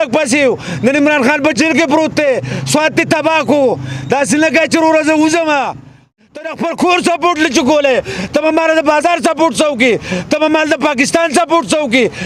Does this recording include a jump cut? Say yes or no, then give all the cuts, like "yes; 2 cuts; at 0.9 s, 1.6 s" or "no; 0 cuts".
yes; 1 cut; at 6.1 s